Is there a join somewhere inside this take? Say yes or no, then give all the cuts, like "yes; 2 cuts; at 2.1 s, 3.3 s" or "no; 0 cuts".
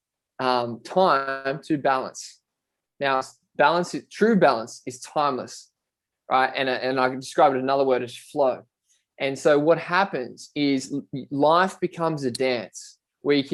no; 0 cuts